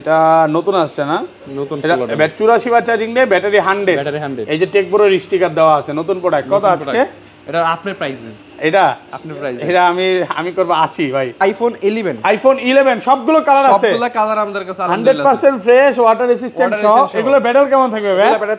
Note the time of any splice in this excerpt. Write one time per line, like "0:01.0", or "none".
0:11.4